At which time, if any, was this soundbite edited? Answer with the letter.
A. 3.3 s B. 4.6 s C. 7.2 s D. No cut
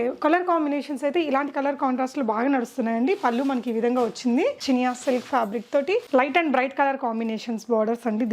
B